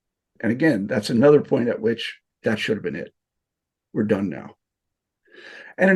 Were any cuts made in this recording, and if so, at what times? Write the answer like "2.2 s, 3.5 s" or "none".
2.3 s